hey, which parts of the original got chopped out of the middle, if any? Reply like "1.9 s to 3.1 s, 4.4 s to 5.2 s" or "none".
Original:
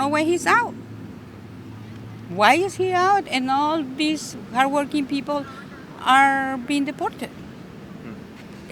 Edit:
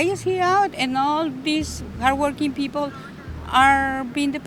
none

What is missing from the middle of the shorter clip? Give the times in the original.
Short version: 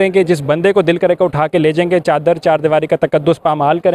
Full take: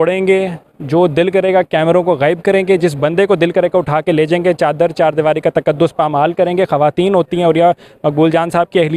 none

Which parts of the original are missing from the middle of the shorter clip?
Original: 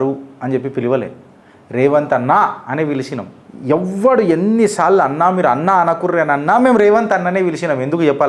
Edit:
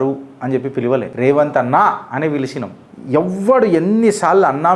1.1 s to 1.7 s

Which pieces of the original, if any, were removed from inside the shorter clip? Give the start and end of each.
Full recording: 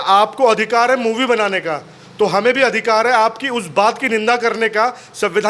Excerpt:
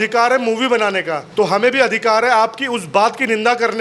1.8 s to 2.0 s

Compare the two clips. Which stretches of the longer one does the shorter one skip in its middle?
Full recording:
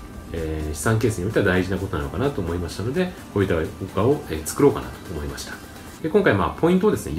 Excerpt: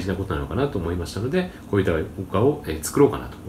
none

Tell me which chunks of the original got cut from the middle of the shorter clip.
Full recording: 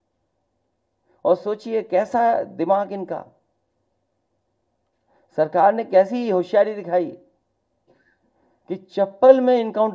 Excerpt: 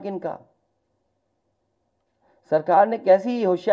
none

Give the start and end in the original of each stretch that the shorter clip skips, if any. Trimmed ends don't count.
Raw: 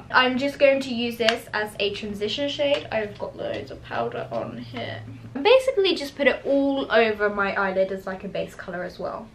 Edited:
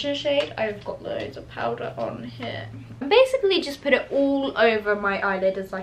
none

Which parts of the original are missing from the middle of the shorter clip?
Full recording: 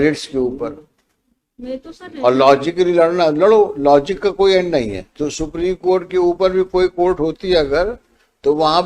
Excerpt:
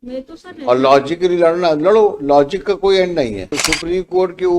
5.0 s to 5.2 s

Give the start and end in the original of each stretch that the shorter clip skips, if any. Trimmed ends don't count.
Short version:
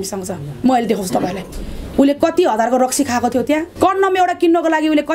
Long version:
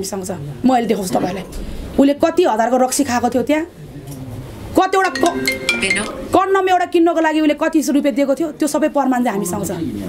3.7 s to 6.2 s

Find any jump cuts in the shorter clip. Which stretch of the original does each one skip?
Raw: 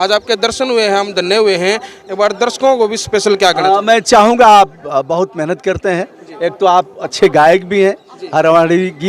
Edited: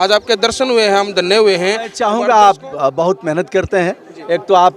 1.9 s to 4.1 s

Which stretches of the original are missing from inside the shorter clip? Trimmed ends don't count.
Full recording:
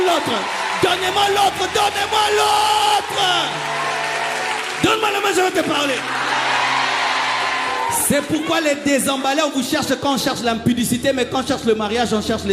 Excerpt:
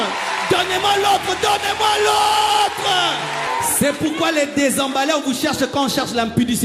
3.8 s to 7.8 s

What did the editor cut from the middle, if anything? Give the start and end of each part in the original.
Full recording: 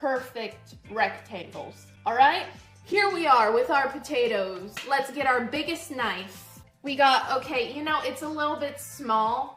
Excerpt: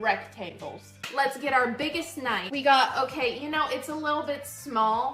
1.9 s to 4.7 s, 6.2 s to 6.8 s

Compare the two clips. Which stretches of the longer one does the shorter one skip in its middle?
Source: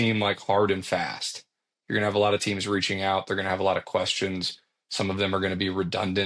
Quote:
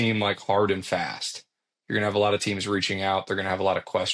none

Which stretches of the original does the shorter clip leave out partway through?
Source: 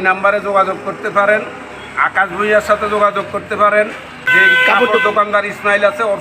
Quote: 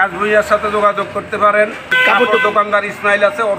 4.1 s to 4.5 s

